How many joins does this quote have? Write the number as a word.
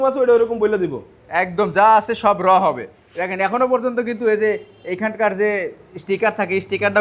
zero